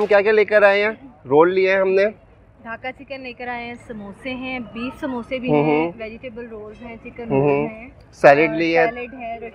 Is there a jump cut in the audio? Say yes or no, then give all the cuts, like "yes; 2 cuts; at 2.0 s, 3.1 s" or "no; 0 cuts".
no; 0 cuts